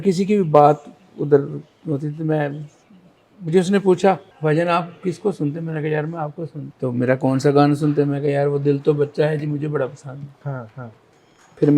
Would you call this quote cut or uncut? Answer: cut